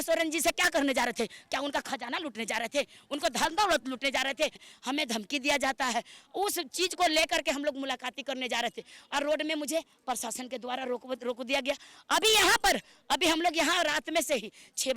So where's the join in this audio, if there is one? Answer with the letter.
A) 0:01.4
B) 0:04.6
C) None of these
B